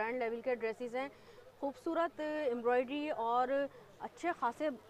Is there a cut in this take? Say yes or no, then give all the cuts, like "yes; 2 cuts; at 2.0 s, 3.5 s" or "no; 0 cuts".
no; 0 cuts